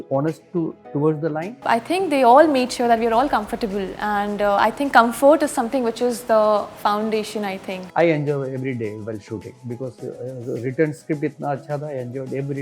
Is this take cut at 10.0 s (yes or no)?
no